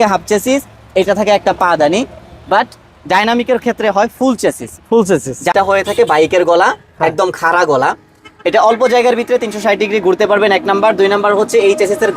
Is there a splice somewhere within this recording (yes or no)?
yes